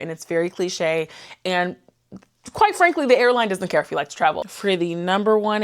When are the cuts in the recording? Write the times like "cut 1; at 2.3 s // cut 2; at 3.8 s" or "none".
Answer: cut 1; at 4.4 s